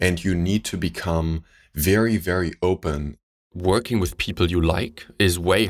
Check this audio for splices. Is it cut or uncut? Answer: cut